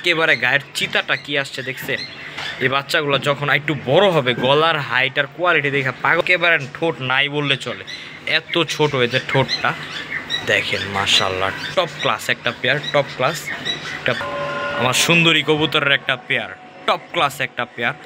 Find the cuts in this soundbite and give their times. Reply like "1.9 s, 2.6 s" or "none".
6.2 s, 14.2 s